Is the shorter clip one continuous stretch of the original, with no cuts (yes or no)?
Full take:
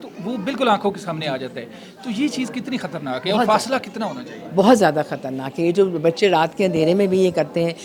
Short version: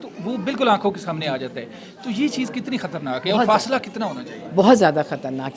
yes